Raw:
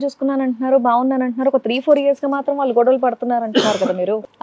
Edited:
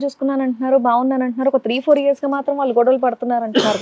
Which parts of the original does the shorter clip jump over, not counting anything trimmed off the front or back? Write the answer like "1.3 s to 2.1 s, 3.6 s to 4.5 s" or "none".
none

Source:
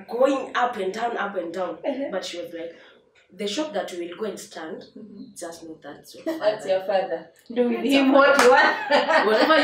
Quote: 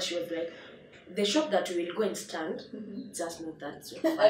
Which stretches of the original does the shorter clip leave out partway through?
none

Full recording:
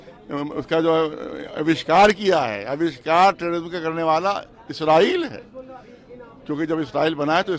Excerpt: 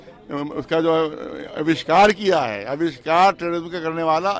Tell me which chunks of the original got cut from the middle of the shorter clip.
none

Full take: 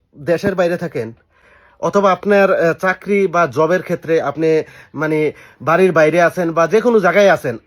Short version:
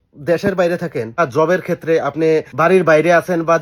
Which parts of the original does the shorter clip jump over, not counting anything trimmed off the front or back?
1.2 s to 3.4 s, 4.7 s to 5.6 s

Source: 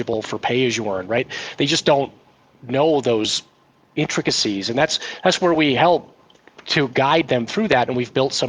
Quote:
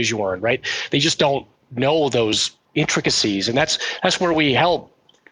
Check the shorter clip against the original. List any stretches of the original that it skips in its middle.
2.3 s to 2.5 s, 3.5 s to 3.7 s

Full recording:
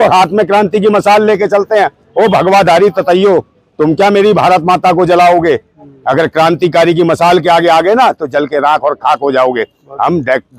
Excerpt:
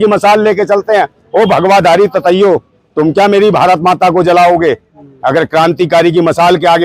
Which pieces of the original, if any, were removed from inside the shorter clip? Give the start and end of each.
none

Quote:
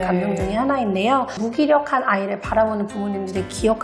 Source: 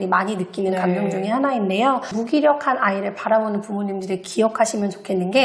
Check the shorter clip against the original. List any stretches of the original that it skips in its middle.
none

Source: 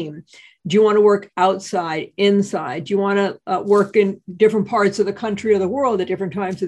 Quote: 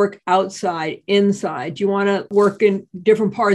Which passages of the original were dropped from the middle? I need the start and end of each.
3.4 s to 3.6 s

